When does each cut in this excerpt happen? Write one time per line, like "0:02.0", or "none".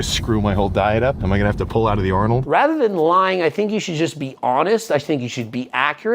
0:01.2
0:02.4